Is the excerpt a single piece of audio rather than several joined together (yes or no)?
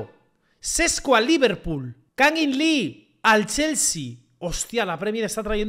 yes